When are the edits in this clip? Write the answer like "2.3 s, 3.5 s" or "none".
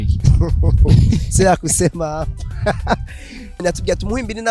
3.6 s